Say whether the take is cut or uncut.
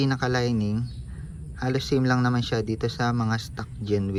uncut